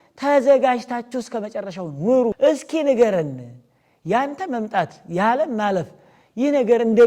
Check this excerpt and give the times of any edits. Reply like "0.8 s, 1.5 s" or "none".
2.4 s